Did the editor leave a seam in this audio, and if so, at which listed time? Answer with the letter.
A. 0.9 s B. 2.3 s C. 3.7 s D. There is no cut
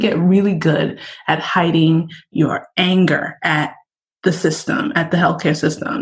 D